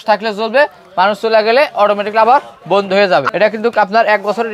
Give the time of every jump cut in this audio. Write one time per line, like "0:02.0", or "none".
0:03.3